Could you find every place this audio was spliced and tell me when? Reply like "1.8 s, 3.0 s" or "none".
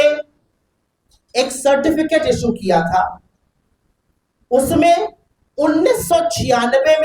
none